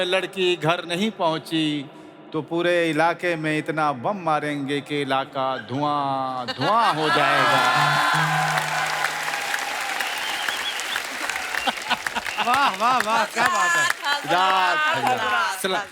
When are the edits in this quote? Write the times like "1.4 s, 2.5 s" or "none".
none